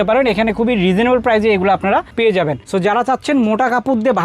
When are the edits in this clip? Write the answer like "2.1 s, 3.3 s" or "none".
none